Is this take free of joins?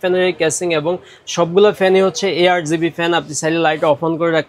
yes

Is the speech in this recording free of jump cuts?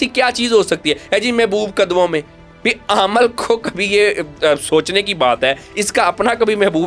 yes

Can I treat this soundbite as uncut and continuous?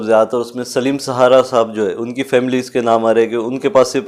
yes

